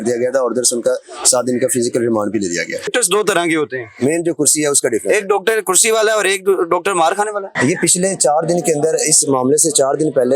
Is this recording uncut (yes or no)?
no